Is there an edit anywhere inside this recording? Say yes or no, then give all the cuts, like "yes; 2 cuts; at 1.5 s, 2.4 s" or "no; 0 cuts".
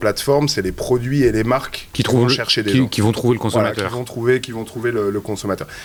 no; 0 cuts